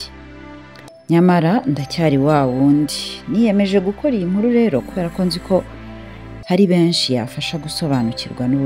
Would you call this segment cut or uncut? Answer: uncut